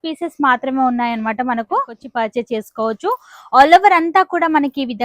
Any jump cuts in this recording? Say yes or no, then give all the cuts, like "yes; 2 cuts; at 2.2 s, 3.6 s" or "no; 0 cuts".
yes; 1 cut; at 2.0 s